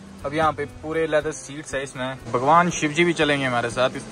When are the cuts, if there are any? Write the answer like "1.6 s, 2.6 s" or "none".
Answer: 2.2 s